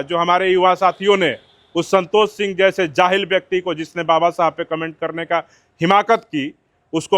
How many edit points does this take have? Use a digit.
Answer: 0